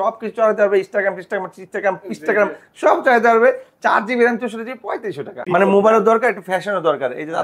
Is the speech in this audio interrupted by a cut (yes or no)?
yes